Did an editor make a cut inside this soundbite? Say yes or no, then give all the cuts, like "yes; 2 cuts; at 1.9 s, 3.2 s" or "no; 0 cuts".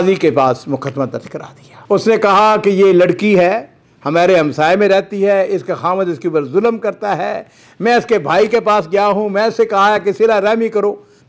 no; 0 cuts